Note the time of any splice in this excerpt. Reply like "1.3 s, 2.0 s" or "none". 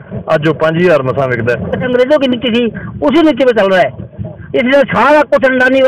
1.9 s